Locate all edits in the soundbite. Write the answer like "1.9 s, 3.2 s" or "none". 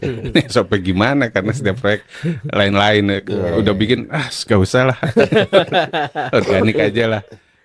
none